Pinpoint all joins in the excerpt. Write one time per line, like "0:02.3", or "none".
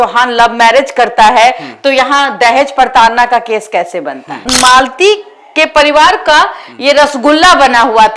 0:04.5